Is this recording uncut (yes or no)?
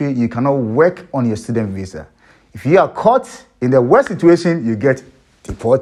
yes